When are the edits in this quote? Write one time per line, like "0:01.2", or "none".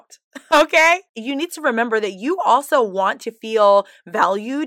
0:01.1